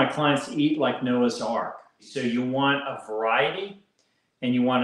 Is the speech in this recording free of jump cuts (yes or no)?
no